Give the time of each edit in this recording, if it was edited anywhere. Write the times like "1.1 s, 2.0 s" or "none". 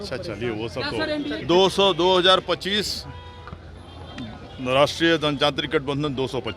1.4 s